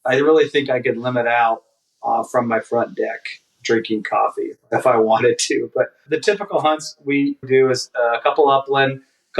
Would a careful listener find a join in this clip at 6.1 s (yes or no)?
yes